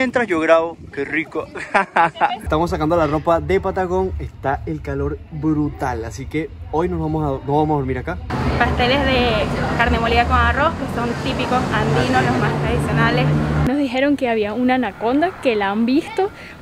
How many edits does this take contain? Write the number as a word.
three